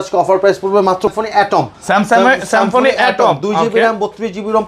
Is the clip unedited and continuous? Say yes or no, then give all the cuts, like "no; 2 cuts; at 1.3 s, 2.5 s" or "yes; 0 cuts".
no; 1 cut; at 1.1 s